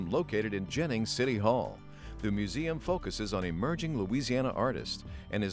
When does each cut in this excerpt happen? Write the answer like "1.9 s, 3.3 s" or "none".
none